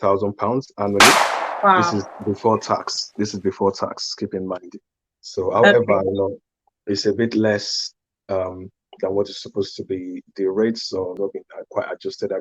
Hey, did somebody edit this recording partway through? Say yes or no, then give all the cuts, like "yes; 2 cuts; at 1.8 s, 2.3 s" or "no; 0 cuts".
yes; 1 cut; at 11.2 s